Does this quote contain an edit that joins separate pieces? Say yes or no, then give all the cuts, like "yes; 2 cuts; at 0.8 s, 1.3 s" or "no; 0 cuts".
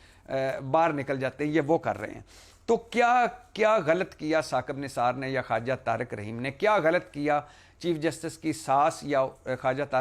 no; 0 cuts